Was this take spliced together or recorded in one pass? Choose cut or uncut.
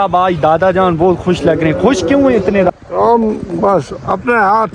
cut